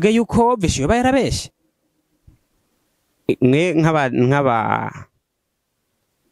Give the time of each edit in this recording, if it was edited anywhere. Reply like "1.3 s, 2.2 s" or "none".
none